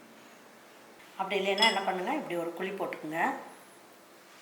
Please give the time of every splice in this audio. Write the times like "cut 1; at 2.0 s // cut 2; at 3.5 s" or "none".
cut 1; at 1.0 s